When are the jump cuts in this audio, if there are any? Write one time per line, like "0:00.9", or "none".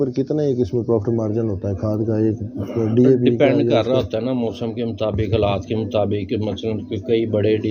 none